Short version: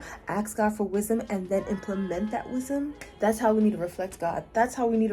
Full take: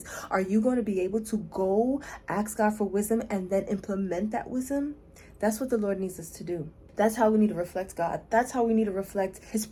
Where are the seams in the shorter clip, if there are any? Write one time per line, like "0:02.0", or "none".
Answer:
0:03.0

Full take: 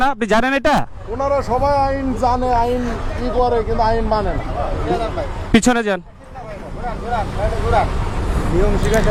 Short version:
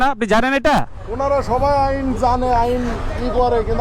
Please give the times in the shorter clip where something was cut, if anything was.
none

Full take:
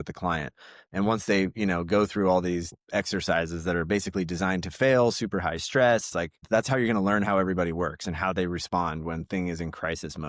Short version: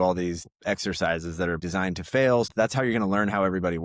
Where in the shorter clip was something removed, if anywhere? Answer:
0:01.6
0:02.5

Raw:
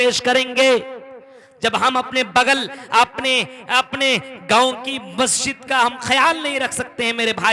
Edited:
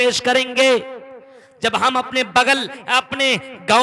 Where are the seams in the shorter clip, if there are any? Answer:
0:02.8

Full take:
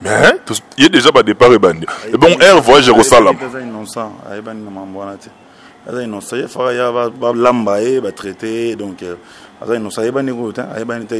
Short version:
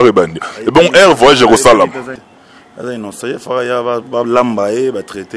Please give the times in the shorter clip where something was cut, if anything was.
0:02.2

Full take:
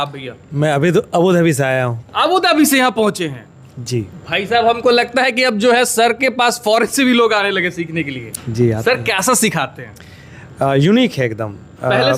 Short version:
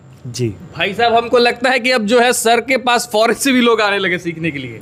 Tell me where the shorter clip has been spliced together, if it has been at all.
none

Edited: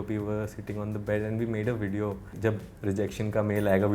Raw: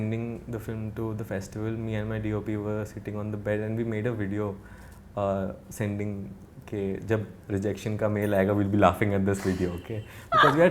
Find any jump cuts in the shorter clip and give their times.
0:02.3

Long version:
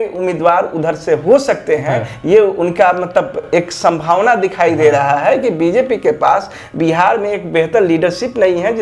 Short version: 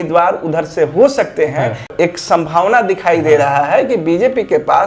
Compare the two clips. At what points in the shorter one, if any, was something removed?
0:01.8

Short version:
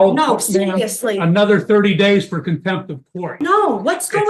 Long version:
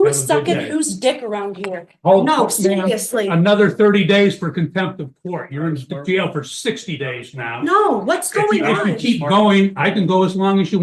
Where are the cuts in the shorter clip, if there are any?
0:03.2

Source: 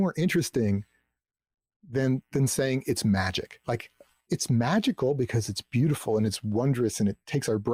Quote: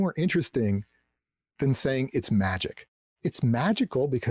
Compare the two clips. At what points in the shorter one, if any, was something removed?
0:01.5
0:02.8

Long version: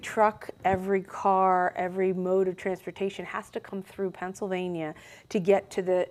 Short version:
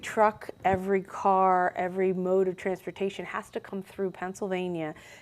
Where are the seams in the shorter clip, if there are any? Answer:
none

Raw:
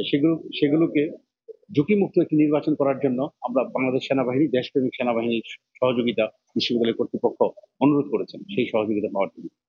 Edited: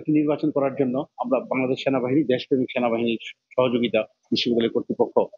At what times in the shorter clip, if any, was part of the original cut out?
none

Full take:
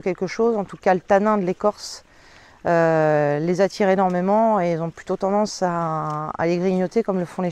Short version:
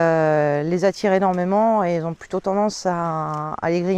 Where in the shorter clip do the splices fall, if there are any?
none

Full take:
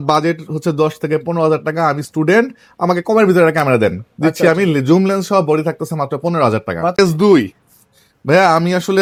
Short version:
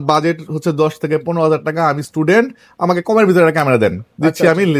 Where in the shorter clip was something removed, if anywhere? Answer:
none

